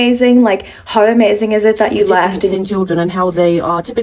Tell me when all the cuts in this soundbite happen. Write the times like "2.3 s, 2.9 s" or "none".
2.5 s